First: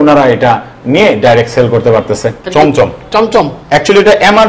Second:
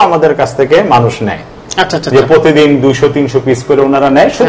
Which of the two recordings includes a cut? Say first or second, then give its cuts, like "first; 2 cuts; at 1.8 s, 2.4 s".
first; 2 cuts; at 2.4 s, 3.6 s